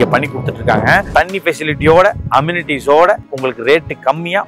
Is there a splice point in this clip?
no; 0 cuts

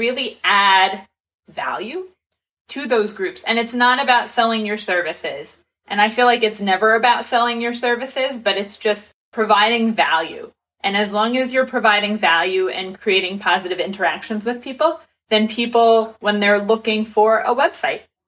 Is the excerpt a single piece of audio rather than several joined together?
no; 1 cut; at 16.1 s

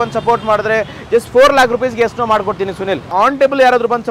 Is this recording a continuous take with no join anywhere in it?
no; 1 cut; at 3.1 s

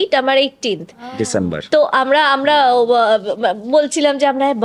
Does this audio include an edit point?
no; 0 cuts

